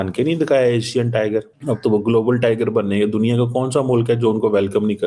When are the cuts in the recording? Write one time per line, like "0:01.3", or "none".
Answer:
0:01.5